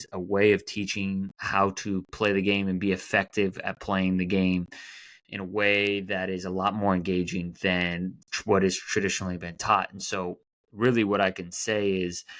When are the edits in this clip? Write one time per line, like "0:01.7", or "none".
0:01.4